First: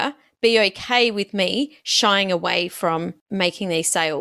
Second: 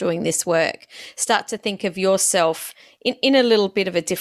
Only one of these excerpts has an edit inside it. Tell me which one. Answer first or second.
first